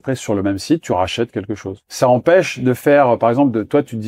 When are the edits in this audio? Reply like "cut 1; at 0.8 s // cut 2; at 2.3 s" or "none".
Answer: cut 1; at 1.8 s